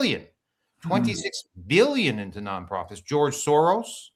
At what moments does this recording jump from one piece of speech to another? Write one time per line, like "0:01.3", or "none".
none

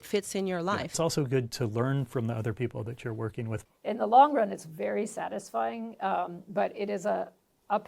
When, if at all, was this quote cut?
0:01.0
0:03.7

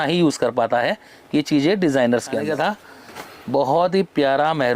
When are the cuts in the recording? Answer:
0:02.4

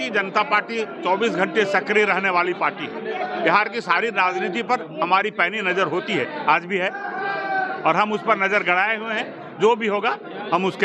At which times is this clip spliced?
none

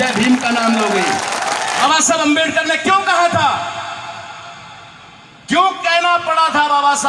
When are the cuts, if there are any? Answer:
0:01.8

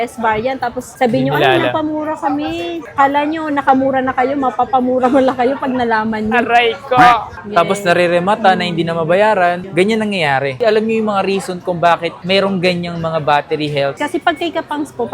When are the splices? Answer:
0:07.4
0:14.0

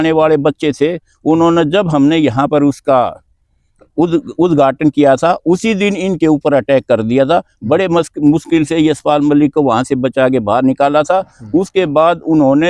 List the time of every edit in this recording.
none

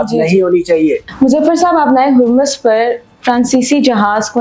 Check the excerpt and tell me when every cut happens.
0:01.0

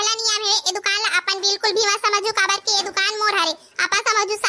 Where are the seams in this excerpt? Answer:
none

